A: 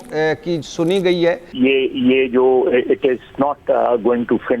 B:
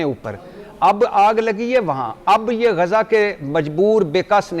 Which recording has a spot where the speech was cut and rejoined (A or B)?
A